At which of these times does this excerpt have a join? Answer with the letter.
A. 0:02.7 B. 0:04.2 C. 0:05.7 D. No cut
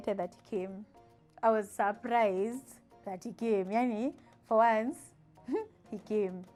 D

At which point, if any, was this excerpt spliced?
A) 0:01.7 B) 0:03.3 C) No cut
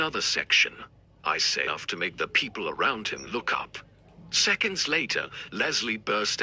A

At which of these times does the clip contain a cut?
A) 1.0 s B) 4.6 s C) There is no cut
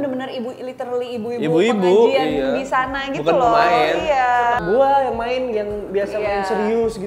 B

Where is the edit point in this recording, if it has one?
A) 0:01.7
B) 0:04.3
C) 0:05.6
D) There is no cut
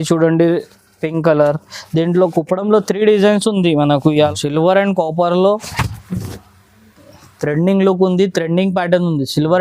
B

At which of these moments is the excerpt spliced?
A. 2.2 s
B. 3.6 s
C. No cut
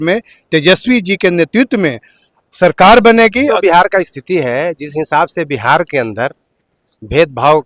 B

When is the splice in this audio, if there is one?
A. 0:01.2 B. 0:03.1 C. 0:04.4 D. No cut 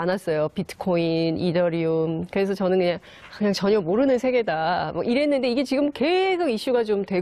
D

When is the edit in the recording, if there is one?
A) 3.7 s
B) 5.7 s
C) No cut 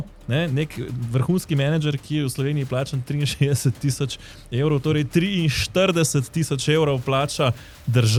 C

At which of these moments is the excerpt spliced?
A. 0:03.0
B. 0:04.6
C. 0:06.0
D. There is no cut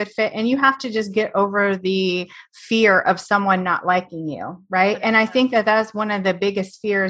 D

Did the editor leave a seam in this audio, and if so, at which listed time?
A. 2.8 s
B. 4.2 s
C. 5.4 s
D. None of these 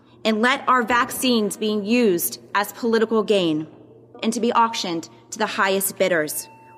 B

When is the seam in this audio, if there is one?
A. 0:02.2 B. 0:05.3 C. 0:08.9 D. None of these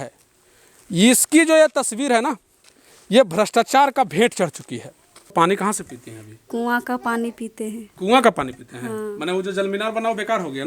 B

